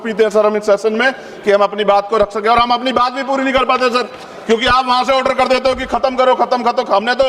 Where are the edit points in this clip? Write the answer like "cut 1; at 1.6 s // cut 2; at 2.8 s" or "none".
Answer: none

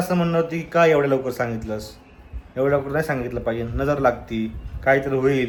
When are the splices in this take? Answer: none

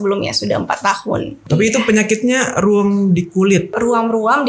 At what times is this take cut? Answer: cut 1; at 1.3 s // cut 2; at 3.7 s

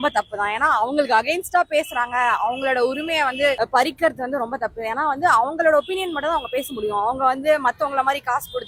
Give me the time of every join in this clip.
none

